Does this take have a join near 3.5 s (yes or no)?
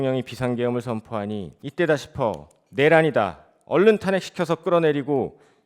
no